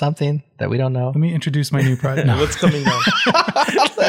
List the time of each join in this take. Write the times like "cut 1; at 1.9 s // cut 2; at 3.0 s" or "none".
none